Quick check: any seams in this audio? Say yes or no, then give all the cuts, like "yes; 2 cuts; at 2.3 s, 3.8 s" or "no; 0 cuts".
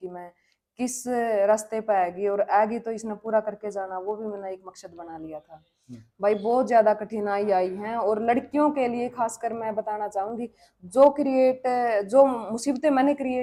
no; 0 cuts